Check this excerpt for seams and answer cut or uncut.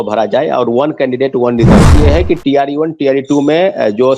cut